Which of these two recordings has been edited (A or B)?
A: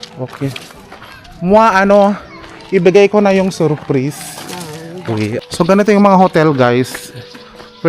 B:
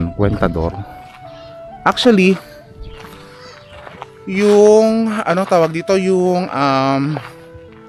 A